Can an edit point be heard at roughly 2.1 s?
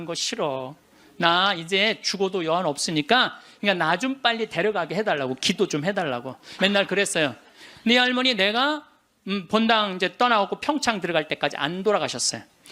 no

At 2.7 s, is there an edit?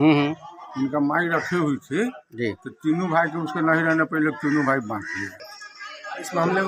no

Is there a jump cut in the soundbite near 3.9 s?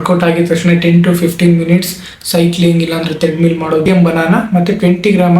yes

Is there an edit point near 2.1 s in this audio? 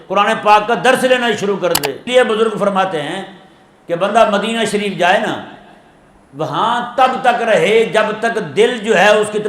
yes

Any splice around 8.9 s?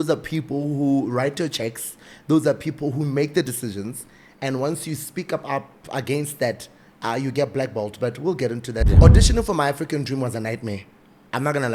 yes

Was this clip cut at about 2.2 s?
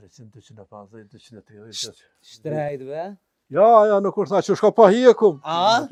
no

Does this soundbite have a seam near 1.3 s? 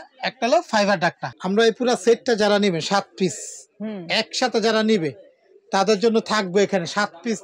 yes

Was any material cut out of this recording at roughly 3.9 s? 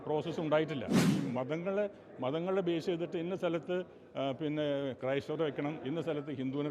no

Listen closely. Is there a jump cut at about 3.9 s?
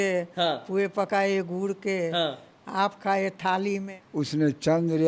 yes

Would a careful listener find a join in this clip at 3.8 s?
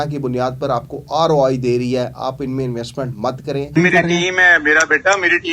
yes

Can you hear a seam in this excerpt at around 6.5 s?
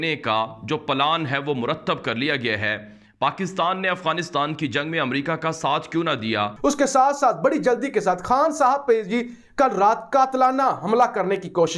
yes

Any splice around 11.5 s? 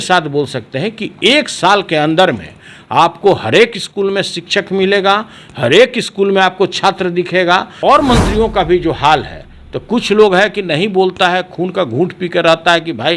no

